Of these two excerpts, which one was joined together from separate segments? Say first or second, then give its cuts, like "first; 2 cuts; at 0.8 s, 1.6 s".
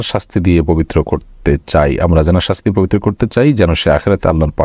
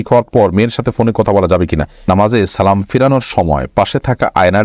second; 1 cut; at 2.1 s